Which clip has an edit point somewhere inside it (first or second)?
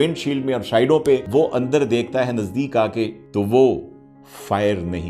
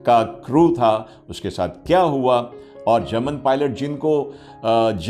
first